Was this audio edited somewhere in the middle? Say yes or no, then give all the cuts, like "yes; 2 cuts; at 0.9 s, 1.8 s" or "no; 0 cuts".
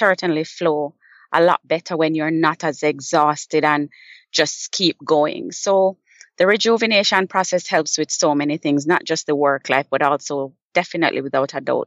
no; 0 cuts